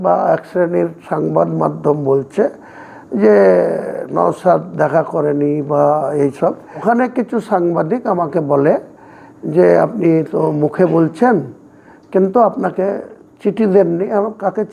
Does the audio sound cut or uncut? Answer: cut